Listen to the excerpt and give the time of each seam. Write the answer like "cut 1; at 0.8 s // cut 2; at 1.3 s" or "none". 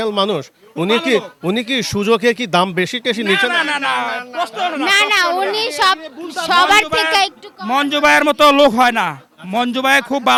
none